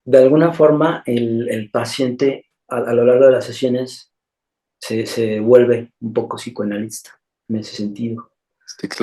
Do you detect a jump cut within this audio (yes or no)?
yes